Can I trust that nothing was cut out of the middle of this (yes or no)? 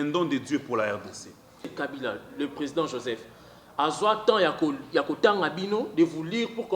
no